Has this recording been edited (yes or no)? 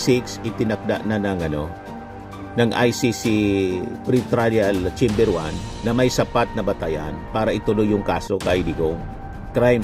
no